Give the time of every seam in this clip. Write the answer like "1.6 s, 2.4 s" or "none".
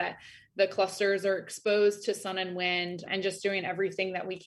none